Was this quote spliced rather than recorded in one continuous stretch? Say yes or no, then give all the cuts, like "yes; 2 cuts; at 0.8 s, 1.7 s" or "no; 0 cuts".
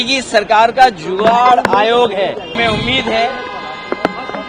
yes; 1 cut; at 2.6 s